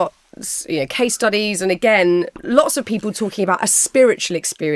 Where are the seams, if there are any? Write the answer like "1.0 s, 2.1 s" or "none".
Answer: 2.4 s